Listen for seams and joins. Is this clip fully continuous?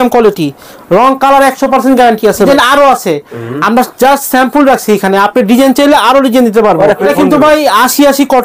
no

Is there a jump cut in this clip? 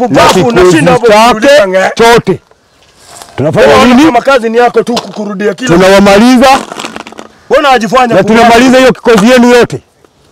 no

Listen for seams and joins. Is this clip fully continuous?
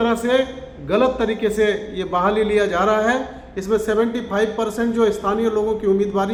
yes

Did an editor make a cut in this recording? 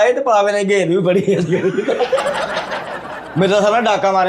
yes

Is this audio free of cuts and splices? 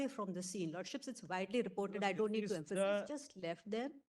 no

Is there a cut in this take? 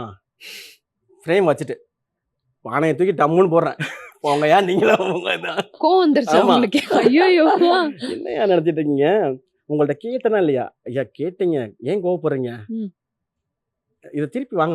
no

